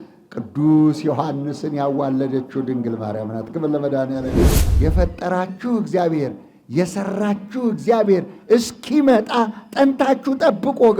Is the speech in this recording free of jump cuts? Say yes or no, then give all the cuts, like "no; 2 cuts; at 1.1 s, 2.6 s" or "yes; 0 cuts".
no; 1 cut; at 4.6 s